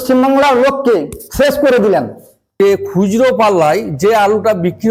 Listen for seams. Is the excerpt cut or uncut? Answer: cut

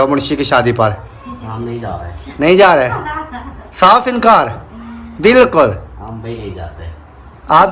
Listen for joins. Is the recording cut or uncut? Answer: uncut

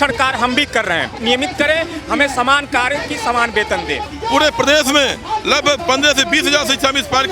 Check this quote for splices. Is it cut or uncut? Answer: cut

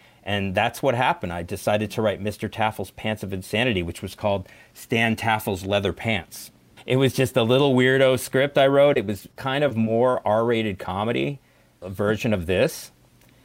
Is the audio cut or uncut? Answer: uncut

